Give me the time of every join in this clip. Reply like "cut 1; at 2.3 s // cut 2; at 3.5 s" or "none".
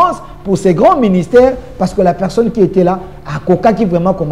none